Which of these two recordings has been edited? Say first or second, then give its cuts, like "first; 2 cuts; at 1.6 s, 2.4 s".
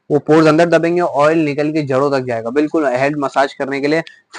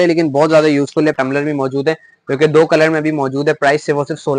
second; 1 cut; at 1.1 s